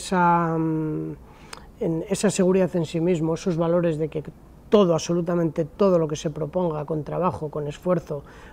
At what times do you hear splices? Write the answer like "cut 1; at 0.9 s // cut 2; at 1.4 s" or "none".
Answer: none